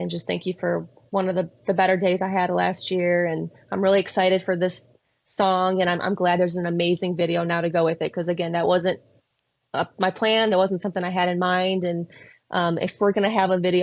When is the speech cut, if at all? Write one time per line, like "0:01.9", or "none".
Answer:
none